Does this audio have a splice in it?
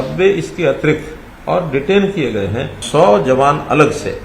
yes; 1 cut; at 2.8 s

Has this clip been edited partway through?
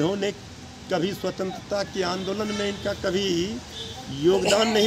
no; 0 cuts

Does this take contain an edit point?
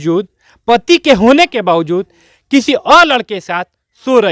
no; 0 cuts

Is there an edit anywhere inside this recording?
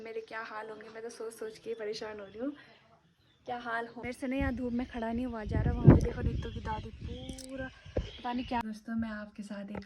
yes; 2 cuts; at 4.0 s, 8.6 s

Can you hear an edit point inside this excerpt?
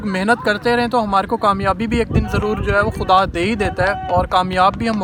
no; 0 cuts

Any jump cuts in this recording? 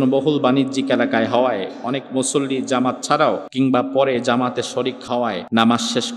yes; 2 cuts; at 3.5 s, 5.0 s

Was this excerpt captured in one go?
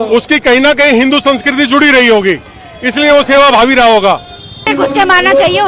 yes; 0 cuts

